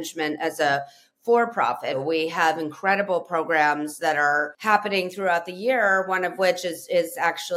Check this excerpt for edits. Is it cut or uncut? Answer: cut